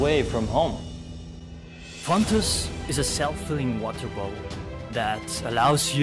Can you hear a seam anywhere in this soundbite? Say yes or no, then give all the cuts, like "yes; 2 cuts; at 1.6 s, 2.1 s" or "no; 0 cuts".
yes; 2 cuts; at 1.4 s, 4.7 s